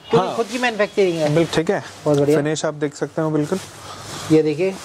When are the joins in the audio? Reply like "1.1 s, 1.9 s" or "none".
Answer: 1.5 s